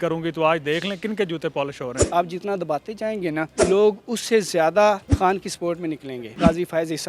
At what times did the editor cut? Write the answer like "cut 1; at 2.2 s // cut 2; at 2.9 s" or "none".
cut 1; at 2.0 s // cut 2; at 3.5 s // cut 3; at 5.1 s // cut 4; at 6.4 s